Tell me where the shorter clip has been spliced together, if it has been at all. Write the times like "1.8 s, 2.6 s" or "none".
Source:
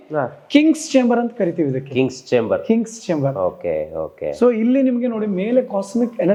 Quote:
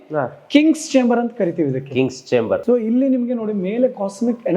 2.6 s